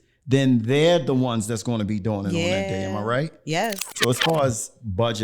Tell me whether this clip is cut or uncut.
cut